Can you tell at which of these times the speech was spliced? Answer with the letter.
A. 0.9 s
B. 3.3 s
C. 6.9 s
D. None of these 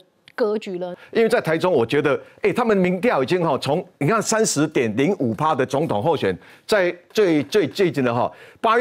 A